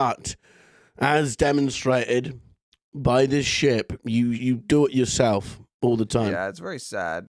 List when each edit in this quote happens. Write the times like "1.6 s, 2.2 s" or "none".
6.4 s